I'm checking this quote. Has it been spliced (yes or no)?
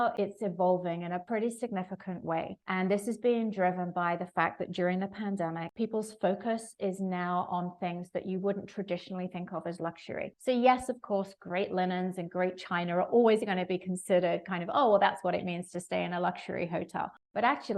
no